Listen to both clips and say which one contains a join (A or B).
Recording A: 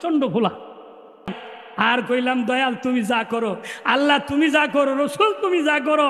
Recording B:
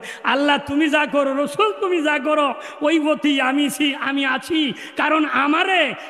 A